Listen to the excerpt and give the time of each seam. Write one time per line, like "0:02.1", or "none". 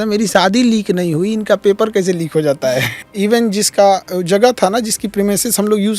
0:03.0